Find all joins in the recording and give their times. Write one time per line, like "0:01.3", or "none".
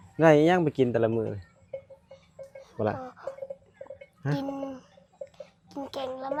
none